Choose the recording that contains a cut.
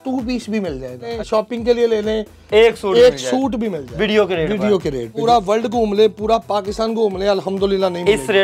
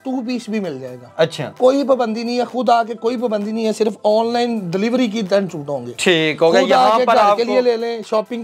first; 2 cuts; at 1.1 s, 5.2 s

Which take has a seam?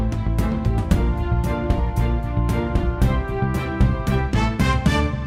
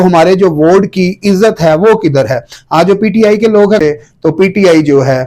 second; 1 cut; at 3.8 s

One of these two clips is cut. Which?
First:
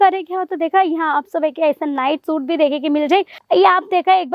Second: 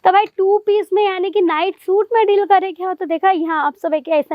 first; 1 cut; at 3.4 s

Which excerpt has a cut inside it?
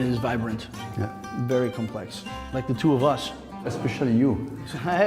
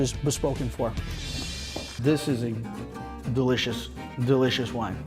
second; 1 cut; at 1.8 s

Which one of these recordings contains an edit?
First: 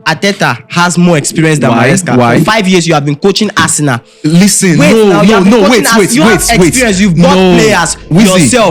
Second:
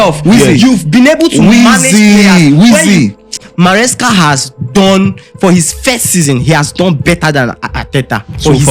second; 1 cut; at 3.3 s

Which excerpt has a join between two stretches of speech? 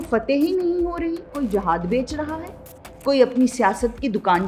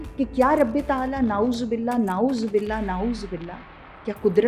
first; 1 cut; at 1.3 s

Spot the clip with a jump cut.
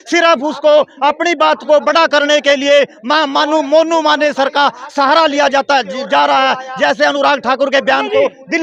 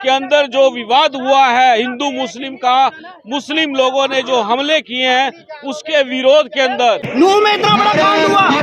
second; 1 cut; at 7.1 s

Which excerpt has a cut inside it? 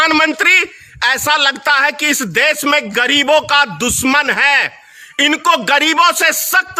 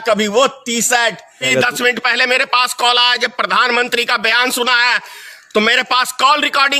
second; 1 cut; at 1.5 s

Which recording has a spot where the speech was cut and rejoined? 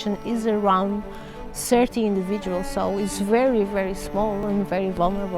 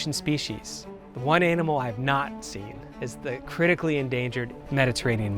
first; 1 cut; at 4.4 s

